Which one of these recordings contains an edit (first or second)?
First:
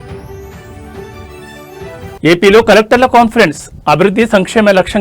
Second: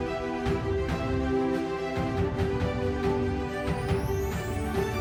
first